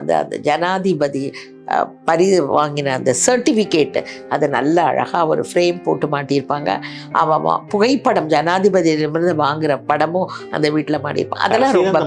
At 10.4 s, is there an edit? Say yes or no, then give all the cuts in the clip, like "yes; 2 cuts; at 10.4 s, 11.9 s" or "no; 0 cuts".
no; 0 cuts